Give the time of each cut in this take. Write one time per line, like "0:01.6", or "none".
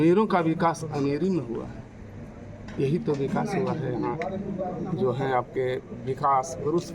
none